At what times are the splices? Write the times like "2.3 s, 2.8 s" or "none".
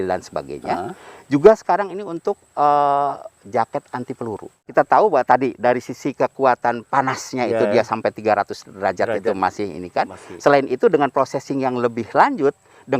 4.6 s

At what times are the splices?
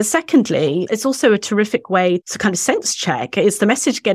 0.8 s, 2.3 s

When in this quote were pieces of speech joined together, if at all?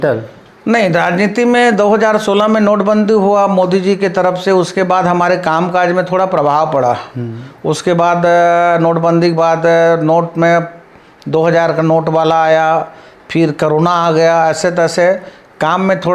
none

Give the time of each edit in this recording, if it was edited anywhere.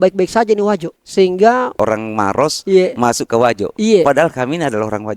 1.0 s, 1.7 s

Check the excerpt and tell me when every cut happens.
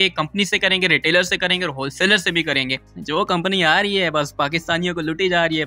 2.9 s

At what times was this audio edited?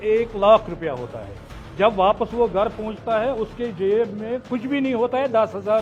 none

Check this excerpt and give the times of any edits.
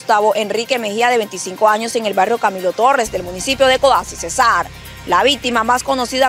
none

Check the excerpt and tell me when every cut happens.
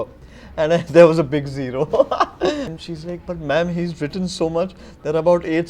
2.7 s

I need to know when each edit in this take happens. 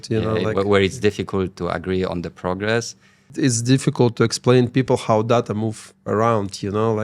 3.3 s

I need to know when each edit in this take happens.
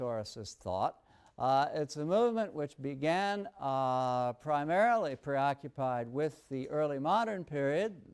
none

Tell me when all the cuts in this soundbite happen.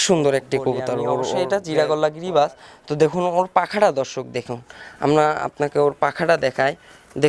1.5 s

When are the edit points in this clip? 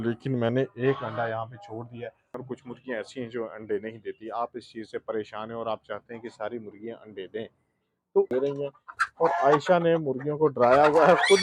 2.4 s, 8.3 s

